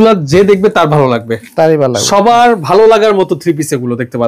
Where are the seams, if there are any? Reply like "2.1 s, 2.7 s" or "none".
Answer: none